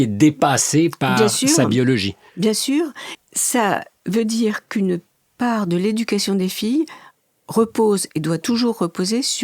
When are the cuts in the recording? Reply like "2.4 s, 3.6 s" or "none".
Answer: 3.1 s